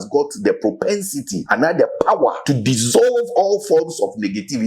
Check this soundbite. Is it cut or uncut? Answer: cut